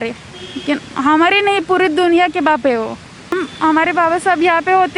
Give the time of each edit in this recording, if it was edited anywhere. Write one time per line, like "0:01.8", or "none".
0:03.5